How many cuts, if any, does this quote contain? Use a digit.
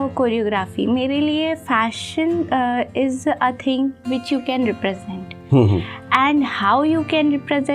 0